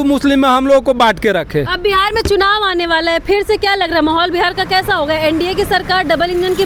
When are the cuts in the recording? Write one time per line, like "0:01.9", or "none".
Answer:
none